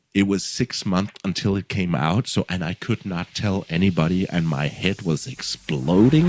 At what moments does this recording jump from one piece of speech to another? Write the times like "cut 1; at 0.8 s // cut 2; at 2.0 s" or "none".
none